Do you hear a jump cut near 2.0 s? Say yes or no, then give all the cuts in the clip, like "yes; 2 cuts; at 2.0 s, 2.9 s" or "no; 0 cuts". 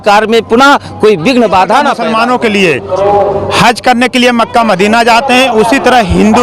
yes; 1 cut; at 2.0 s